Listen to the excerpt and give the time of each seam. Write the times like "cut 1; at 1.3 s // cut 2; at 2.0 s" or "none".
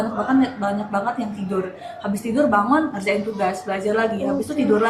none